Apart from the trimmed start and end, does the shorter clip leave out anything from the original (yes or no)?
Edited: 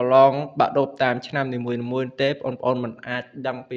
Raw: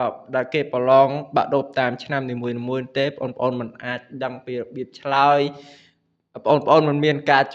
no